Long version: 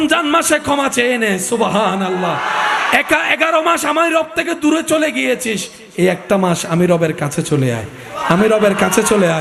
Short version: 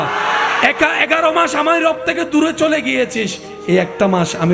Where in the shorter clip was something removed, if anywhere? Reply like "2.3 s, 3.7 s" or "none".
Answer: none